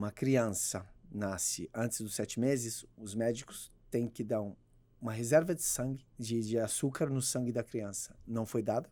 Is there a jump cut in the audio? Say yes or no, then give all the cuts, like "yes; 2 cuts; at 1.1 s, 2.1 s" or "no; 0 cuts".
no; 0 cuts